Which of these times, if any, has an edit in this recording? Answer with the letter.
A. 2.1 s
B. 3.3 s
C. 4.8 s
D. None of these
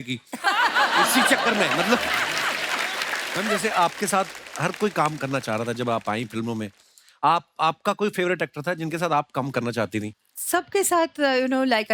B